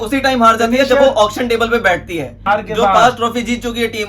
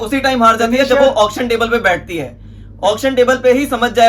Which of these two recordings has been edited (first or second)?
first